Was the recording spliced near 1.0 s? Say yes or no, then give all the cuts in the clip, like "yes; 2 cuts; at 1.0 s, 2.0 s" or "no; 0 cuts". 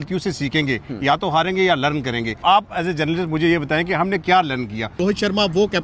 no; 2 cuts; at 2.4 s, 5.0 s